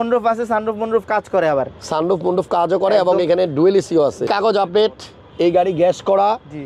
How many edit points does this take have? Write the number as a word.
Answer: one